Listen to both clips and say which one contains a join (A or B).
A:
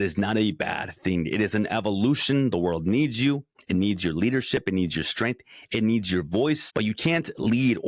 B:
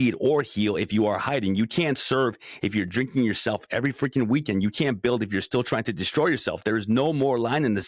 A